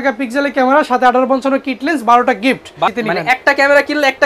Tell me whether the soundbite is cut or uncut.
cut